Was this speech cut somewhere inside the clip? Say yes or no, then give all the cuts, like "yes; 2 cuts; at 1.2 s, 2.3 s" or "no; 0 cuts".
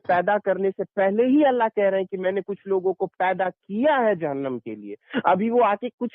no; 0 cuts